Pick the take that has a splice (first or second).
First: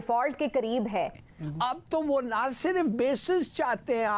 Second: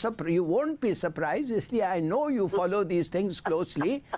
first